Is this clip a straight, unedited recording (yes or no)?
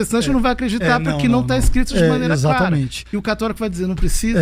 yes